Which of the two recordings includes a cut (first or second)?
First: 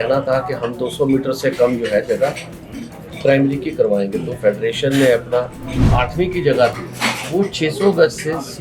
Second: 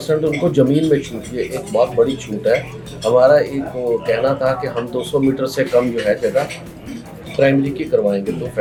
first